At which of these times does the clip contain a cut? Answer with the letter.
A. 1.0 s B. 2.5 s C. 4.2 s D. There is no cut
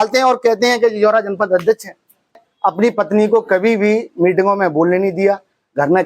B